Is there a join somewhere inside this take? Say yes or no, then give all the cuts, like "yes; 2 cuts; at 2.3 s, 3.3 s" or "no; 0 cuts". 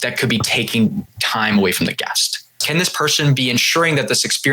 yes; 1 cut; at 2.6 s